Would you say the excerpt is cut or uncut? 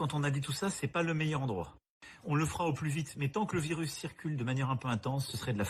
uncut